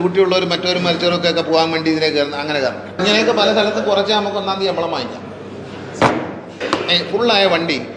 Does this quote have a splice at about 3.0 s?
yes; 2 cuts; at 3.0 s, 6.5 s

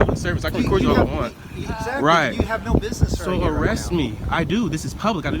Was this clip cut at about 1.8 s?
no; 1 cut; at 3.2 s

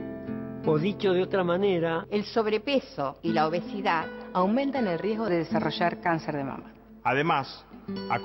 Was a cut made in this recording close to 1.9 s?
no; 1 cut; at 5.3 s

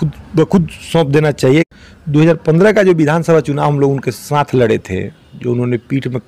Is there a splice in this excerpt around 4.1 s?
no; 1 cut; at 1.7 s

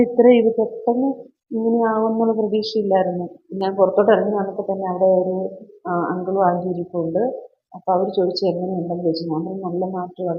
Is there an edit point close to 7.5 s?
no; 1 cut; at 3.3 s

